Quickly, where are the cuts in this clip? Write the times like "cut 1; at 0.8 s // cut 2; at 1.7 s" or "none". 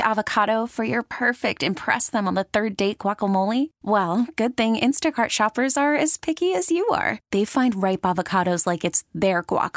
none